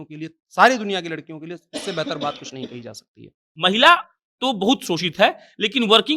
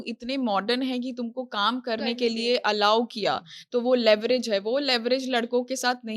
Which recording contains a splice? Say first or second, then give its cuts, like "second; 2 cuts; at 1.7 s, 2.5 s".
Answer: first; 1 cut; at 3.5 s